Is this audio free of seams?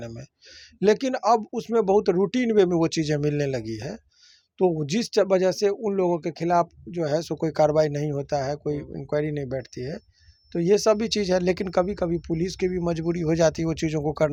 yes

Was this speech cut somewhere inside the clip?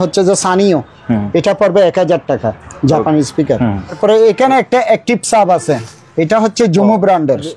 yes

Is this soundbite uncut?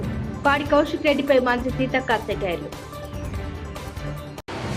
yes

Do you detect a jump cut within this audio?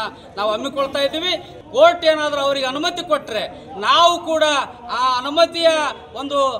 yes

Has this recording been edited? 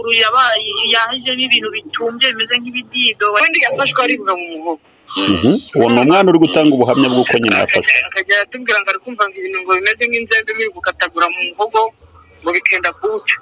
yes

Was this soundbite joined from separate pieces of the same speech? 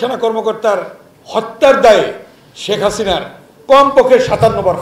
no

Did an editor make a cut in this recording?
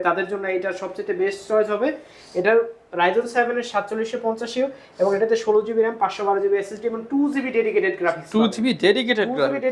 no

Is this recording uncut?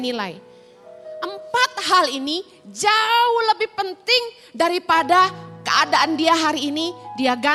yes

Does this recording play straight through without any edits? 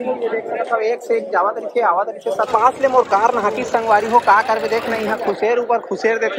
no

